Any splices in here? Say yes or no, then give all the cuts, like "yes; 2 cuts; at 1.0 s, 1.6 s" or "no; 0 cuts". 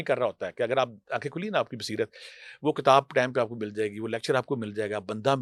no; 0 cuts